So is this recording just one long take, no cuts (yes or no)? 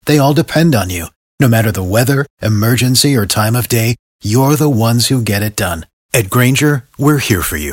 yes